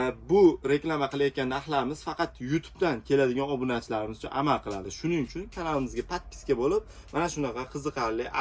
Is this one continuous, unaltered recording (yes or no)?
yes